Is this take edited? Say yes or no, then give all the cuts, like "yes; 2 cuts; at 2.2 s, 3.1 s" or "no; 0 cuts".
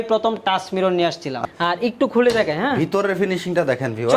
yes; 1 cut; at 1.4 s